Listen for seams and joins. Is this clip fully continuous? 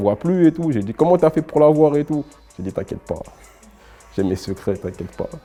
yes; 0 cuts

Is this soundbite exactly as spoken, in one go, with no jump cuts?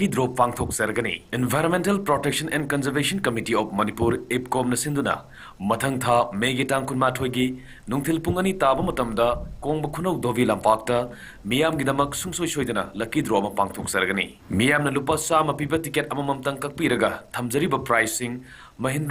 no; 1 cut; at 1.1 s

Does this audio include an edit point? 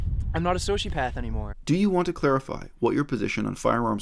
yes; 1 cut; at 1.4 s

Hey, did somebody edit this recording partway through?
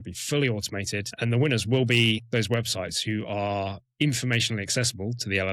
yes; 3 cuts; at 1.1 s, 2.2 s, 3.8 s

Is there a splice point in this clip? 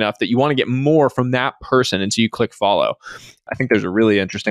yes; 1 cut; at 3.4 s

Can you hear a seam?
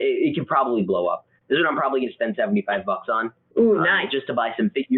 no; 0 cuts

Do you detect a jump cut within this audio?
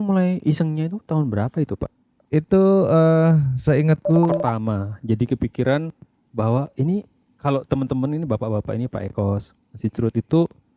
yes; 1 cut; at 4.3 s

